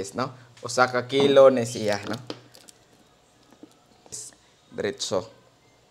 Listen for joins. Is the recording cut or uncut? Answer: cut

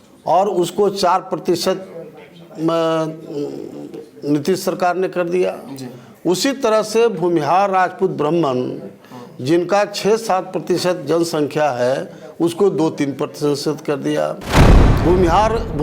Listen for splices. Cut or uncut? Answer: cut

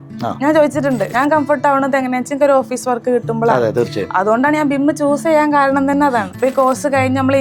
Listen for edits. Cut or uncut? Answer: cut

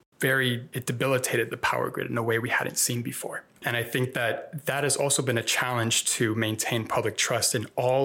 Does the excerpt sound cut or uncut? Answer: cut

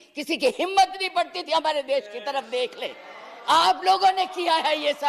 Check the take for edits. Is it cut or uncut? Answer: uncut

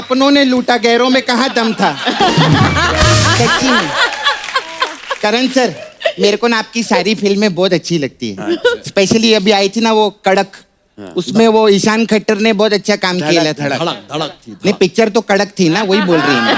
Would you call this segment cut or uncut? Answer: uncut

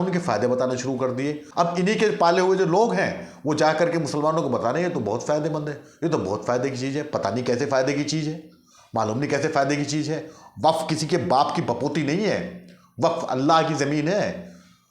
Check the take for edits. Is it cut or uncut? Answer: cut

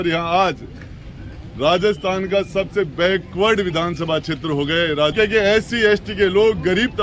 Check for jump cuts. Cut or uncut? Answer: cut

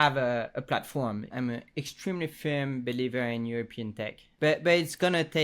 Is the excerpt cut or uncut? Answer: cut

